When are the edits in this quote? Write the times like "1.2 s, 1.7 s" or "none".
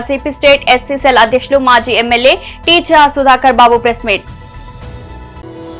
none